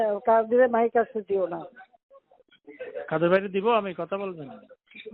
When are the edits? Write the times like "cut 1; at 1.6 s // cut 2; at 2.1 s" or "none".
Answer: none